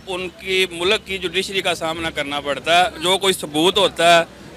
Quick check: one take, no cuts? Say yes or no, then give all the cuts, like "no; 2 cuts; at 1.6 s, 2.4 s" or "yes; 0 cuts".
yes; 0 cuts